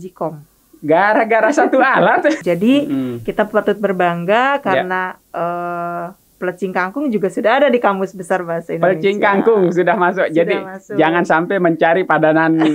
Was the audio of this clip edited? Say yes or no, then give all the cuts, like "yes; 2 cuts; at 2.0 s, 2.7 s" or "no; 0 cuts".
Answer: yes; 1 cut; at 2.4 s